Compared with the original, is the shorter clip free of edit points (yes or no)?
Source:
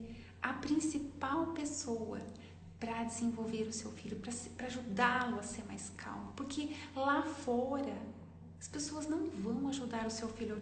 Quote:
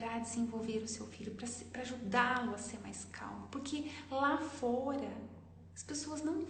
yes